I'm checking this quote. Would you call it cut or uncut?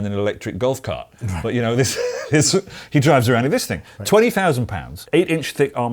cut